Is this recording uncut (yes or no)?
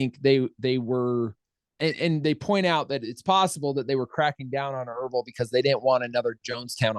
yes